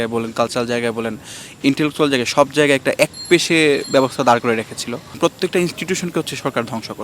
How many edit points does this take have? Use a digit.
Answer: 1